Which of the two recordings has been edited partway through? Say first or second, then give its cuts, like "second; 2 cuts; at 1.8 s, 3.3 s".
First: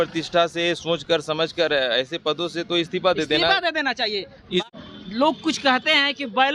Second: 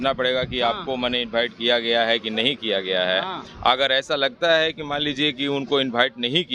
first; 1 cut; at 4.6 s